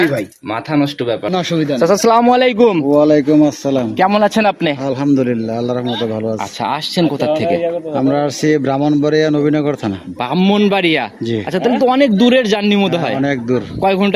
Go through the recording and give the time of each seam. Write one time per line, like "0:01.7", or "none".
0:01.3